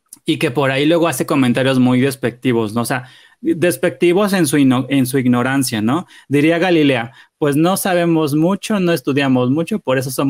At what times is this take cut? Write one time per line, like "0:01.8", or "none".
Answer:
none

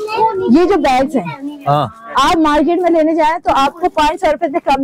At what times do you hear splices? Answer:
none

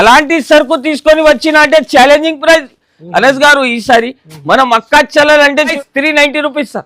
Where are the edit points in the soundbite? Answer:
0:05.7

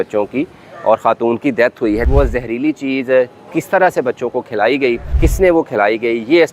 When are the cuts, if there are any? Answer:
0:02.0
0:05.1

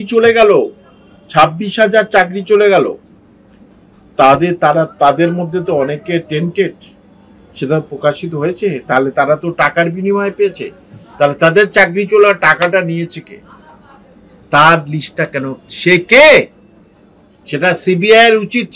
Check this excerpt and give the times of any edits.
none

